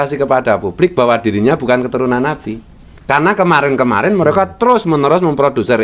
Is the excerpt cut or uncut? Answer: cut